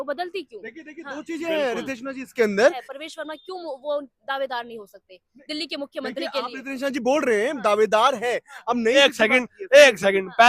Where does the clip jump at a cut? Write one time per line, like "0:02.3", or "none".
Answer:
0:02.9
0:08.9